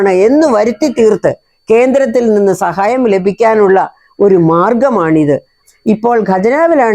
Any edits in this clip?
yes; 1 cut; at 5.6 s

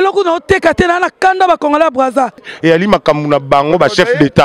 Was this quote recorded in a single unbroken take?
no; 1 cut; at 2.5 s

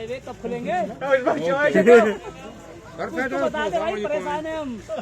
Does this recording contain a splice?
no; 0 cuts

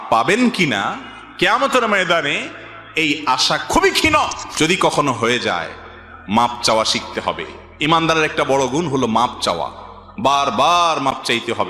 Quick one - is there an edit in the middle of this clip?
yes; 1 cut; at 4.4 s

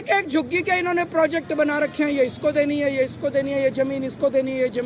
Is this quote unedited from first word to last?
yes; 0 cuts

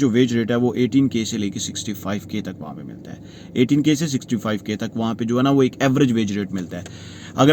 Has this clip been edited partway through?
no; 0 cuts

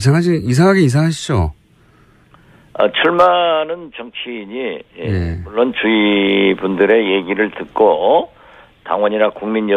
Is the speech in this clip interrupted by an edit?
no; 0 cuts

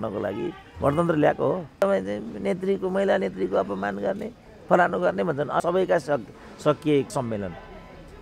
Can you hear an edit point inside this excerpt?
yes; 3 cuts; at 1.8 s, 5.6 s, 7.1 s

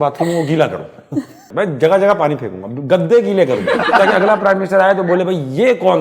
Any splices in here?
yes; 2 cuts; at 1.4 s, 3.9 s

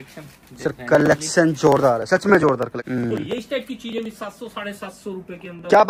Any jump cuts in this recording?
yes; 1 cut; at 2.8 s

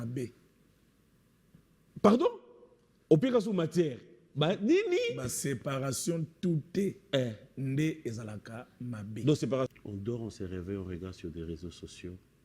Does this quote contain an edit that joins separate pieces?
yes; 1 cut; at 9.7 s

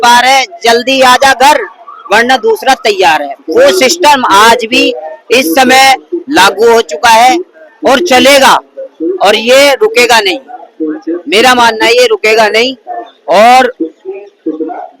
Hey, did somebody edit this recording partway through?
no; 0 cuts

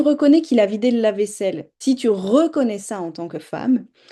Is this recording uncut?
no; 1 cut; at 1.7 s

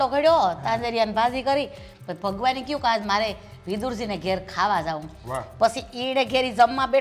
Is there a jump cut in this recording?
no; 0 cuts

